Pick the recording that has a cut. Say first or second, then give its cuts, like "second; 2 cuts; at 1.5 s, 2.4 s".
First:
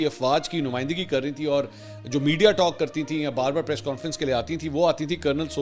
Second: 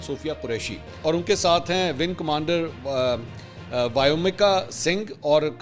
second; 1 cut; at 0.9 s